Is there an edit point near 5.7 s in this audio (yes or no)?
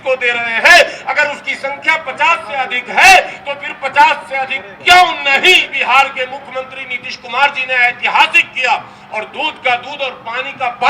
yes